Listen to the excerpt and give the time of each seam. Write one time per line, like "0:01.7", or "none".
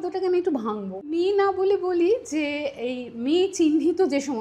0:01.1